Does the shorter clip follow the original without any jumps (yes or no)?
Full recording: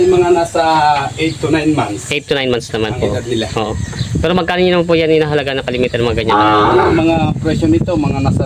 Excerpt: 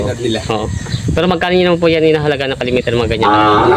yes